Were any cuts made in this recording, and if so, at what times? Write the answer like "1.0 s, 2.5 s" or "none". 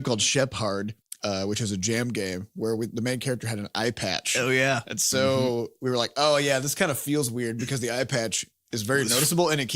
1.0 s